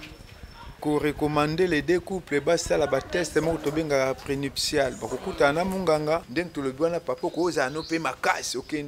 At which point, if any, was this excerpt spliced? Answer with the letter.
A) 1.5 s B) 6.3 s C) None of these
B